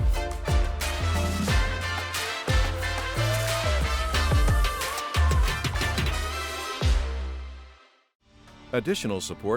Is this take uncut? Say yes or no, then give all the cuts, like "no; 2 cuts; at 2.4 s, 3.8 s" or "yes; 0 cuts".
no; 1 cut; at 8.5 s